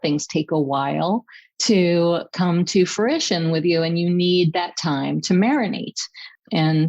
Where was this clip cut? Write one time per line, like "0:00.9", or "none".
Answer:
none